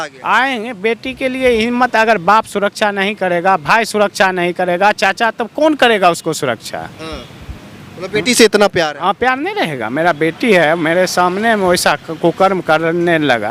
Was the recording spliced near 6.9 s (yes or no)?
no